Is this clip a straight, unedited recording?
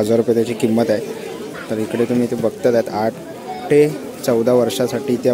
yes; 0 cuts

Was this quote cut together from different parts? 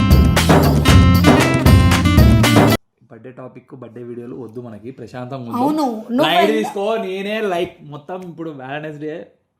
yes; 1 cut; at 3.0 s

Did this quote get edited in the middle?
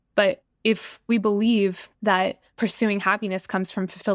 yes; 2 cuts; at 1.0 s, 2.1 s

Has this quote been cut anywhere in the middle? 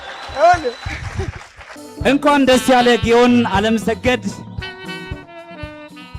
yes; 1 cut; at 1.7 s

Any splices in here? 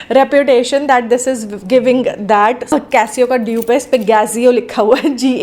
yes; 1 cut; at 2.7 s

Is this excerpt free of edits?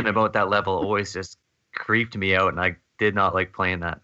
yes; 0 cuts

